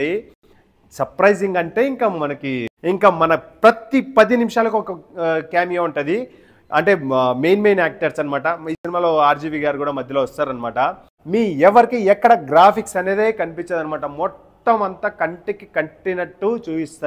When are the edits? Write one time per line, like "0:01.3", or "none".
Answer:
0:02.7
0:11.1